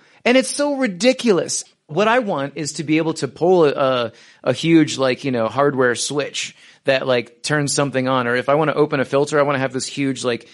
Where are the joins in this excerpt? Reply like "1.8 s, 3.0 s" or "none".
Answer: 1.8 s